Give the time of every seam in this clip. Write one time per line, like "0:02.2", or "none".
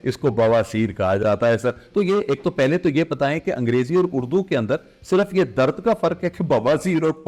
none